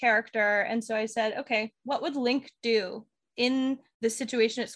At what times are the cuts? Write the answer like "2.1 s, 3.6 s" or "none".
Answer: 3.2 s, 3.9 s